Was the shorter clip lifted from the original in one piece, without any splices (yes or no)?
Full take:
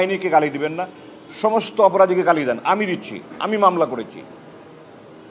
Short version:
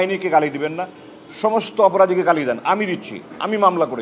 yes